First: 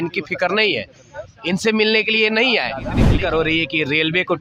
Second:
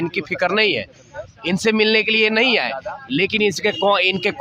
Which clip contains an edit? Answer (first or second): first